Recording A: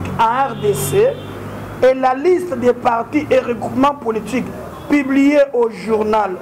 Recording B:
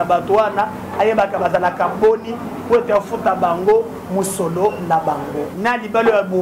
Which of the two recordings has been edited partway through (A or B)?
B